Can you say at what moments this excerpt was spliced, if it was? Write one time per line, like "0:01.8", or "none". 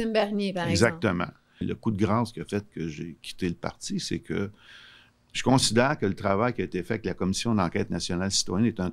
0:01.5